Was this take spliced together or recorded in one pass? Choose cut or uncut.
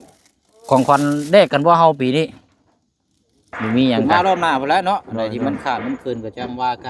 cut